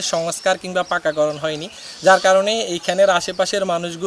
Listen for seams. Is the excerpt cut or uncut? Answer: uncut